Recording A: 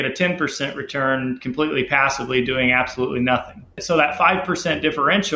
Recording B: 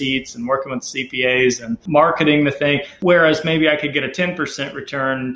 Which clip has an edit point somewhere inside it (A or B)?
B